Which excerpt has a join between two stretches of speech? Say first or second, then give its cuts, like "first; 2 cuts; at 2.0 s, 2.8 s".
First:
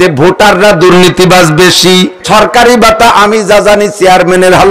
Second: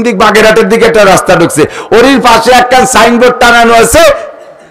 first; 1 cut; at 2.2 s